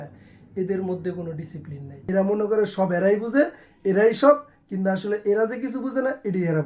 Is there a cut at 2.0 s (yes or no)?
yes